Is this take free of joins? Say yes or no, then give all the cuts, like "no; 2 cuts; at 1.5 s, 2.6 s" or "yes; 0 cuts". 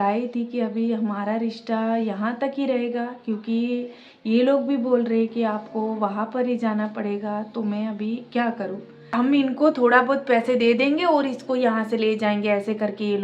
no; 1 cut; at 9.1 s